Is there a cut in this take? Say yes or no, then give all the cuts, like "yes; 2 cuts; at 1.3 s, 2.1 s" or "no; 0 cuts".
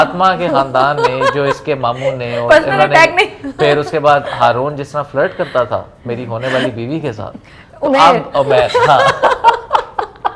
no; 0 cuts